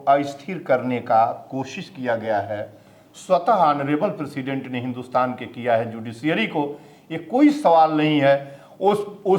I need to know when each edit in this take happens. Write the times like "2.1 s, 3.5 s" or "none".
none